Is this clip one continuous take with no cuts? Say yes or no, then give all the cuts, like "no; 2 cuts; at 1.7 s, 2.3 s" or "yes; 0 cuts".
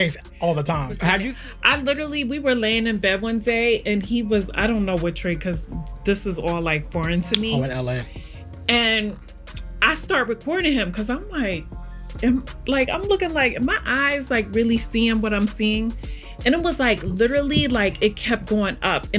yes; 0 cuts